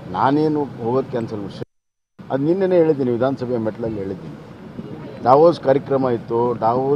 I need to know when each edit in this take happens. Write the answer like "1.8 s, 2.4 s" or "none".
1.6 s